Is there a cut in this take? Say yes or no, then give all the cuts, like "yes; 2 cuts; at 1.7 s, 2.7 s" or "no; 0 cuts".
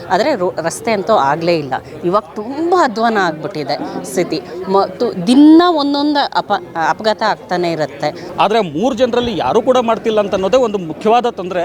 yes; 1 cut; at 8.2 s